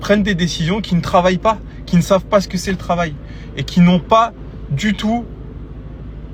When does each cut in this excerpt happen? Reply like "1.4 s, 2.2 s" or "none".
none